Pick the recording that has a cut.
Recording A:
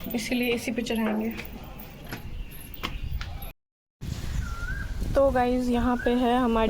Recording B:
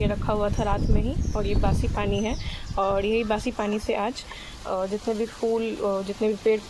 A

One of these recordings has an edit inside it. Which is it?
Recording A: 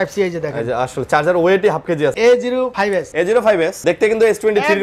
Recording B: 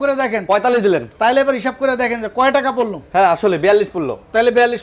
A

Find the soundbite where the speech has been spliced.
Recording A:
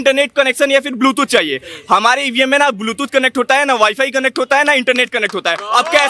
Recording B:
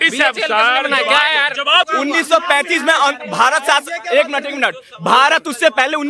B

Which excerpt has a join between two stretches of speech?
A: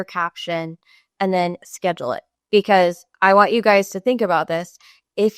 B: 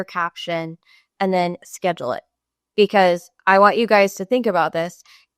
A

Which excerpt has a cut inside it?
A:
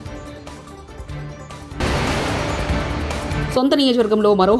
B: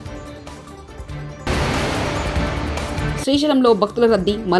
B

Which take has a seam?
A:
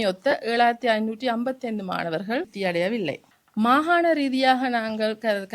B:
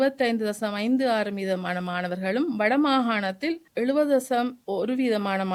A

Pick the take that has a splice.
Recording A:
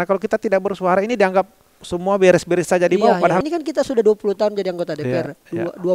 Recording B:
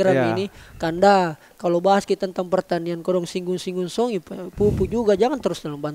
A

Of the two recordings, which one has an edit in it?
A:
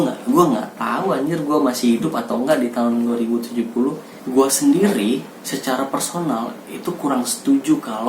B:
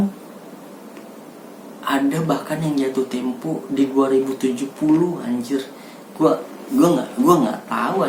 A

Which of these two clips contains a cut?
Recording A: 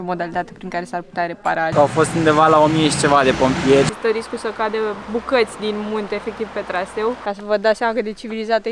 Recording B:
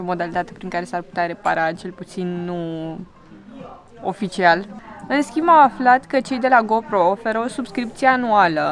A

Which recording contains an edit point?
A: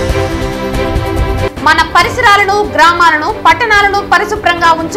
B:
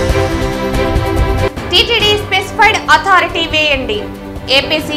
B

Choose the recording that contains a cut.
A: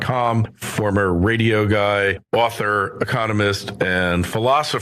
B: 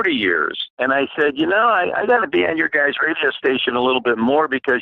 B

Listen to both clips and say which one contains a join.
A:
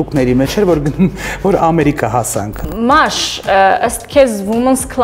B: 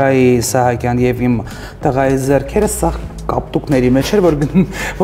A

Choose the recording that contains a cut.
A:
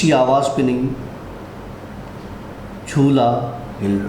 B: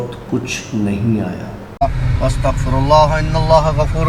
B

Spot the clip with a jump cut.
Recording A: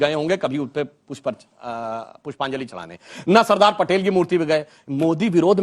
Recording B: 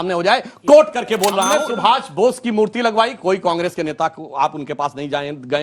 B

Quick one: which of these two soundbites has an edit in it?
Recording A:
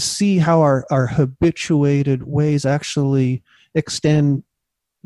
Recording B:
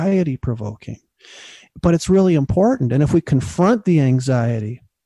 B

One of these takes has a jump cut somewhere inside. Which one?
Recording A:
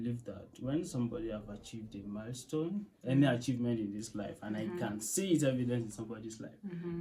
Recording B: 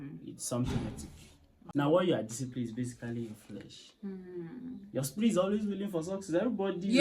B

